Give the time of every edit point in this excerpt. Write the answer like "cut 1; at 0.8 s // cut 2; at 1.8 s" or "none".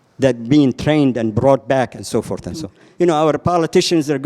cut 1; at 2.8 s